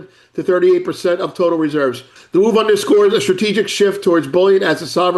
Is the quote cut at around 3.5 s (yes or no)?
no